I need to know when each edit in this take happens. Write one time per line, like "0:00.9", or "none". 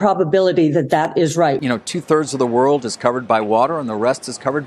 0:01.6